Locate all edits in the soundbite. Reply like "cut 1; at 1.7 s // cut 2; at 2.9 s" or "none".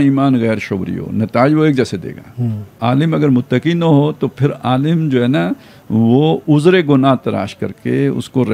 cut 1; at 2.8 s